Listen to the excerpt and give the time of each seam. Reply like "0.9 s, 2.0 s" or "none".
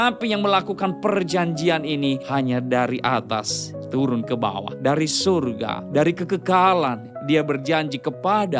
2.2 s, 4.7 s, 5.8 s